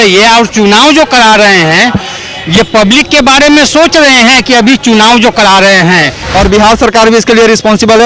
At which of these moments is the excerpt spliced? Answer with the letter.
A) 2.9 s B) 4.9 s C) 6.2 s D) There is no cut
C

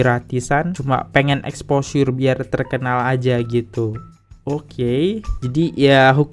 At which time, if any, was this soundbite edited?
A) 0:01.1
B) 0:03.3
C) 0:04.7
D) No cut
D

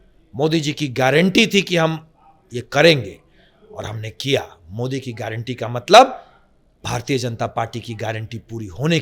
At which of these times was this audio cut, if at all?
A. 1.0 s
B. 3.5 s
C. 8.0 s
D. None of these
D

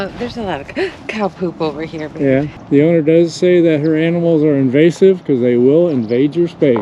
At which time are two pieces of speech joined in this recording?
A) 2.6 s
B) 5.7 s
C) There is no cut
A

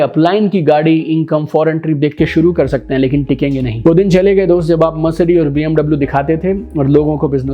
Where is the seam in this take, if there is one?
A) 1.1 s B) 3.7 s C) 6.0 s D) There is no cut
B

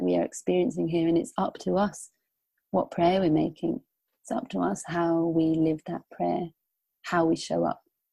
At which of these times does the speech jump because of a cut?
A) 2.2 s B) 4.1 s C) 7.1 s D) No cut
B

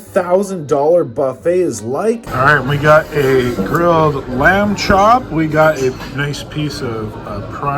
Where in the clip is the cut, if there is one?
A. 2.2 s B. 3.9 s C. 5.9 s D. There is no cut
A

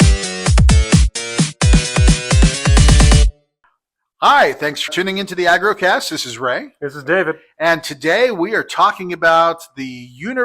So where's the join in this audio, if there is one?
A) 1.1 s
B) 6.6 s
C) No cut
A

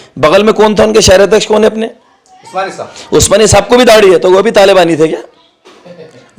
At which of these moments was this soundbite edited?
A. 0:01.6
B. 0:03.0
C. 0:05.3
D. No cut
D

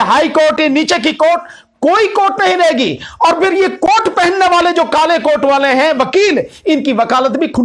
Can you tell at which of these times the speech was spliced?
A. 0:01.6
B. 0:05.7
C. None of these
C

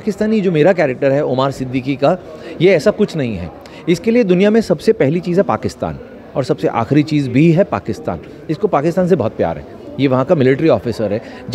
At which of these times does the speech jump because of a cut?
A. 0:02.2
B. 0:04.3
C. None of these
C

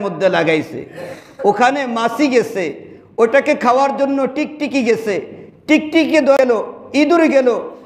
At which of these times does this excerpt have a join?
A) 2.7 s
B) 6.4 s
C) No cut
B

